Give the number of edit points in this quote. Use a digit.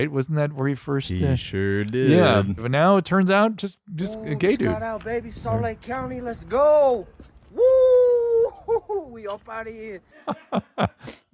2